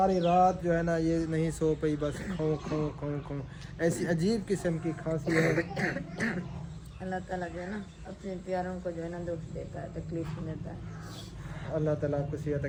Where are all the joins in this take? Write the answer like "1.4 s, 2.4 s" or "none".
none